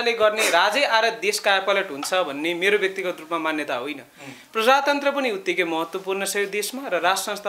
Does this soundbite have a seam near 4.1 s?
no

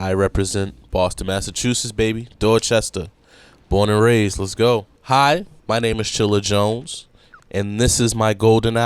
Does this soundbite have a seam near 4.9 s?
yes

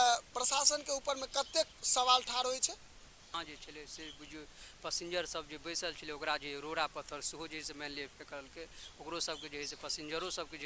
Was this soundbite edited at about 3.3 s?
yes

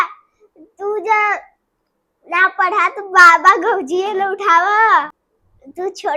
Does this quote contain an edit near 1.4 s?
no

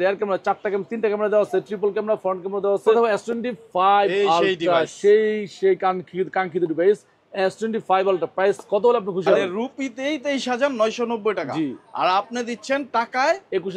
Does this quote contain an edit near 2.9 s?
yes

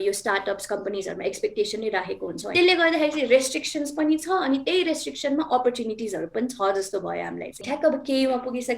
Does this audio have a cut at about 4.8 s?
no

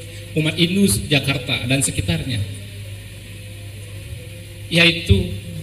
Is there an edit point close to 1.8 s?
no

